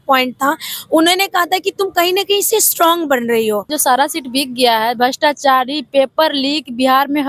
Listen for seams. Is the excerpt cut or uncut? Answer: cut